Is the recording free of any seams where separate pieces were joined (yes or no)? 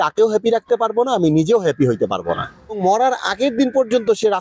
no